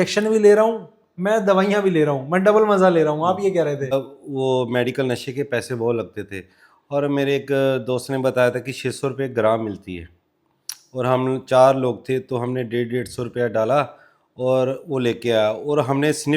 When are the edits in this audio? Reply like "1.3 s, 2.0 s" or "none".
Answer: 3.9 s